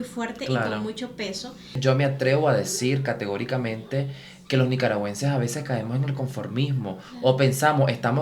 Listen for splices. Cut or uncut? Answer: cut